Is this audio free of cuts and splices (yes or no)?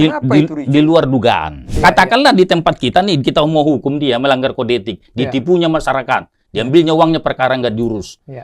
no